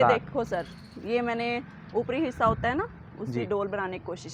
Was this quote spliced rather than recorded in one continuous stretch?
no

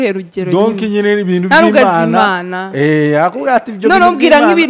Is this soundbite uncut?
yes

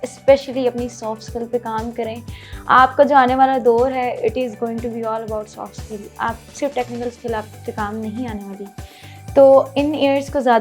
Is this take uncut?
yes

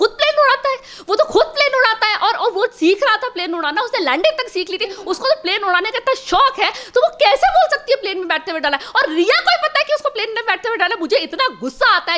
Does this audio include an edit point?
no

